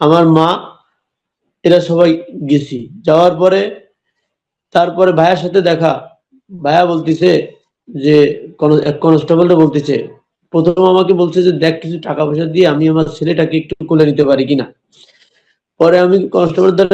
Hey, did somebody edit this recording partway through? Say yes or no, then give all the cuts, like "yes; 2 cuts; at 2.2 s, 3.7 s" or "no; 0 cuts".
no; 0 cuts